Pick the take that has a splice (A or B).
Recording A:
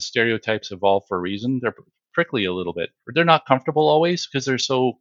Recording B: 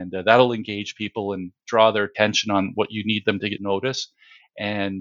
B